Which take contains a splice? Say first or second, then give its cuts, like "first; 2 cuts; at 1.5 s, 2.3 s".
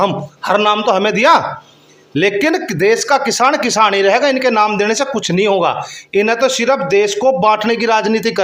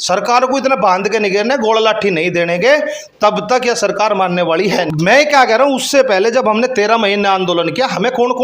second; 1 cut; at 4.9 s